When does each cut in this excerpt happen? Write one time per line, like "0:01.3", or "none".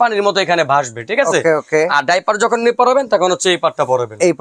none